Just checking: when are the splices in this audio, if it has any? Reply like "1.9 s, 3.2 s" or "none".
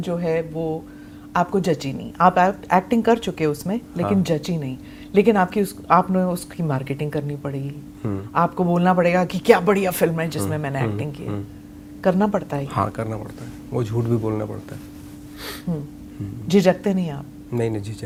none